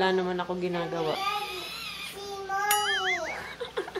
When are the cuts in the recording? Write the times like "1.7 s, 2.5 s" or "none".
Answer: none